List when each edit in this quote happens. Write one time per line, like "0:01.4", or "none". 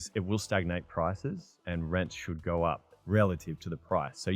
0:02.9

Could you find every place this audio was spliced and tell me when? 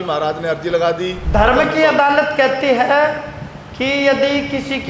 0:01.2

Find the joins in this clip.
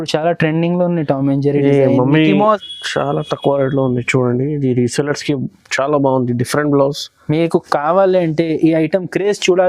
0:02.7

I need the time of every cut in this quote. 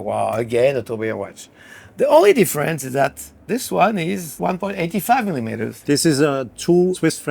0:03.4
0:05.7

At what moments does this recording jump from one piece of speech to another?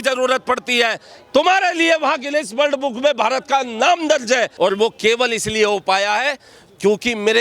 0:04.5

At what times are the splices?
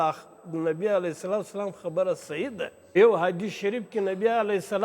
0:03.0

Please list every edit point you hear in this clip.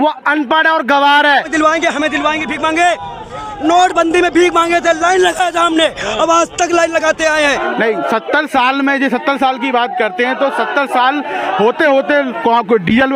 0:01.5
0:07.6

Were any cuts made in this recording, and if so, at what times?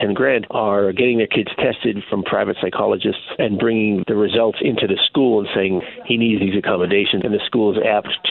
0:03.3
0:05.8
0:07.2

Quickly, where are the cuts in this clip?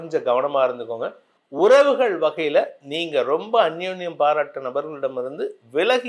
none

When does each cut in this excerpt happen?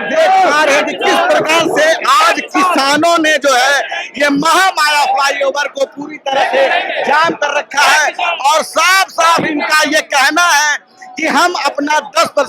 none

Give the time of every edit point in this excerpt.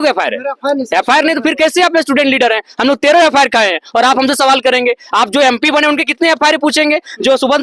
none

